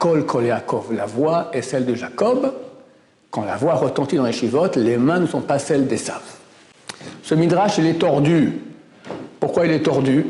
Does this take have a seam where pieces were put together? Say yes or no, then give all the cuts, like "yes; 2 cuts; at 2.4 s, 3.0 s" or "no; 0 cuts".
no; 0 cuts